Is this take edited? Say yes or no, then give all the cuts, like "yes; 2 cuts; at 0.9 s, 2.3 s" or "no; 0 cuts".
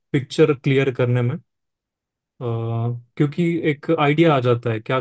no; 0 cuts